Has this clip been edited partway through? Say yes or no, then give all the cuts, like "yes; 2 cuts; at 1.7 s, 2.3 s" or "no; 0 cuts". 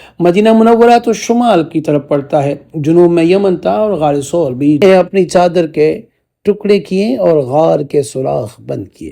yes; 1 cut; at 4.8 s